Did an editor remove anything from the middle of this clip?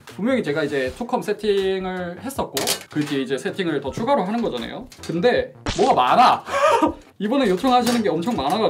no; 0 cuts

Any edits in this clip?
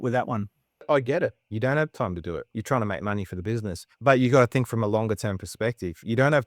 yes; 3 cuts; at 0.9 s, 2.5 s, 3.8 s

